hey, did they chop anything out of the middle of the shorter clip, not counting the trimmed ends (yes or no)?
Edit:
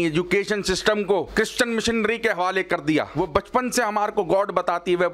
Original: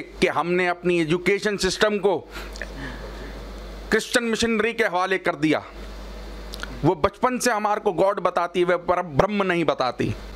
yes